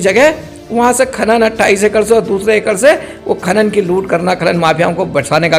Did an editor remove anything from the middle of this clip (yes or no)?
no